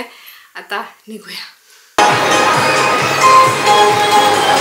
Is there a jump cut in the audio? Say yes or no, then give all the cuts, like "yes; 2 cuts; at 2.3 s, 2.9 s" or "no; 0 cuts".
no; 0 cuts